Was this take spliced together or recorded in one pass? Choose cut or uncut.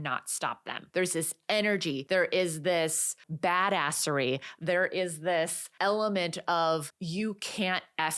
cut